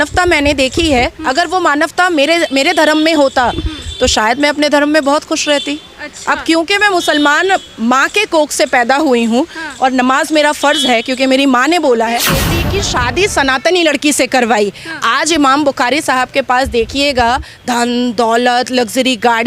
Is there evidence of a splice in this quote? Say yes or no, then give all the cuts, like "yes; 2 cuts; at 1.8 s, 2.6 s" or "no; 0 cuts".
yes; 1 cut; at 12.5 s